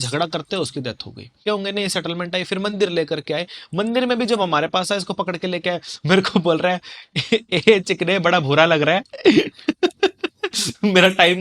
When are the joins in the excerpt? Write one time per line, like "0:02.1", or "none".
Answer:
0:01.4